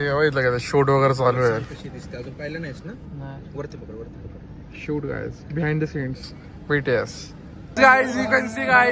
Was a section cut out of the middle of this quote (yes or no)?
yes